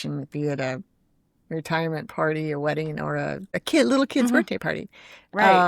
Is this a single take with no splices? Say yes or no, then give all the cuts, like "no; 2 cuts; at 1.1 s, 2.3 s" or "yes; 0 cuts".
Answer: no; 1 cut; at 3.6 s